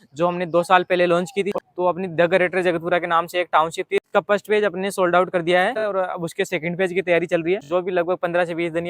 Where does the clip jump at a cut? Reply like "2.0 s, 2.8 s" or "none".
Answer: 1.6 s, 3.8 s, 5.8 s, 7.6 s